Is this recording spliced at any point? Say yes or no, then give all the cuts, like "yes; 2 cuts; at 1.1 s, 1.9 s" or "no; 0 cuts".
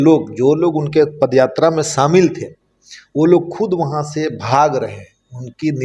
no; 0 cuts